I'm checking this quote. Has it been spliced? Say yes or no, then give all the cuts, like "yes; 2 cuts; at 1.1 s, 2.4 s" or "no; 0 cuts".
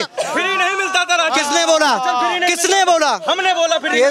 no; 0 cuts